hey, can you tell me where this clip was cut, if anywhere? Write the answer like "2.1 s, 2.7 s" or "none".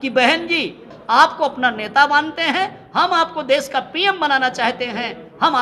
0.9 s